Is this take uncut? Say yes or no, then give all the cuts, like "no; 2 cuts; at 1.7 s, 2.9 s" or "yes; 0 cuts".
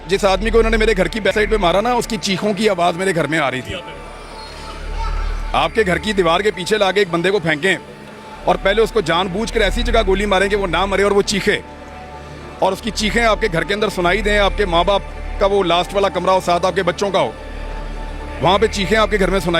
no; 1 cut; at 1.3 s